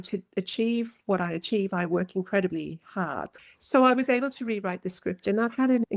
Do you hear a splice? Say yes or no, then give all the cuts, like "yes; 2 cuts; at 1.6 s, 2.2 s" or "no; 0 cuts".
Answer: yes; 1 cut; at 3.2 s